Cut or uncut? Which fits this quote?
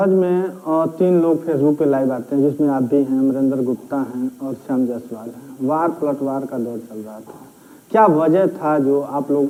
uncut